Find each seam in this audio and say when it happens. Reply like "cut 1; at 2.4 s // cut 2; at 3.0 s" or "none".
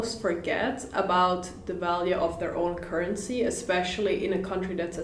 none